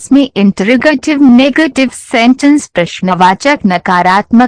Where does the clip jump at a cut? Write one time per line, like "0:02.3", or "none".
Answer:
none